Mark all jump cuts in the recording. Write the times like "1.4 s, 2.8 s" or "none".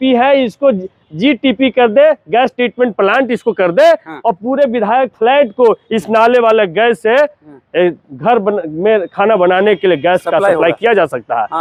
none